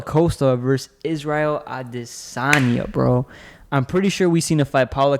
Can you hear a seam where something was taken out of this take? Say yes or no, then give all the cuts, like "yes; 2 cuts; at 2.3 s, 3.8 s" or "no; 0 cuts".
no; 0 cuts